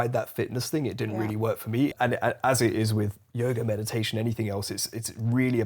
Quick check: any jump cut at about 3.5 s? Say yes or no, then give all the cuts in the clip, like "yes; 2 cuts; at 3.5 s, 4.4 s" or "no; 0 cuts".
no; 1 cut; at 1.9 s